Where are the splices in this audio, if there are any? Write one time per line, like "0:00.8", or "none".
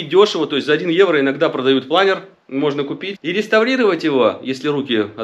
0:03.0